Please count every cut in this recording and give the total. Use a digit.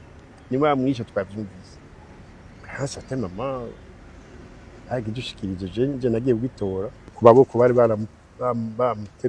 1